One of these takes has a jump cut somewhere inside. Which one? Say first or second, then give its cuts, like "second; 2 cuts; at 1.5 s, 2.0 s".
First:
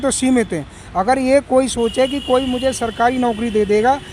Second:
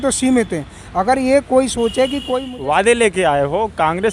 second; 1 cut; at 2.4 s